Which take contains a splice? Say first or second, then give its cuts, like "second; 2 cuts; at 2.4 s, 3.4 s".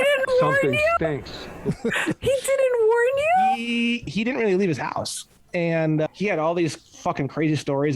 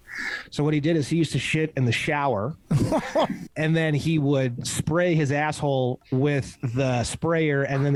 first; 2 cuts; at 4.1 s, 6.1 s